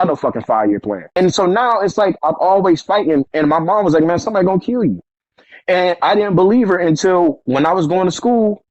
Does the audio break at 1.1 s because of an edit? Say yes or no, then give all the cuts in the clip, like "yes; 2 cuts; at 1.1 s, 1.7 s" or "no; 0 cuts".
yes; 1 cut; at 1.1 s